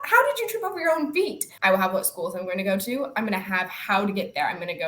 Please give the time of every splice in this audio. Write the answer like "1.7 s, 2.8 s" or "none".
1.5 s